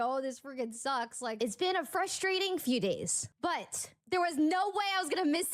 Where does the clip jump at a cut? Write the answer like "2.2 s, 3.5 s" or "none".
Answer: 1.3 s, 3.6 s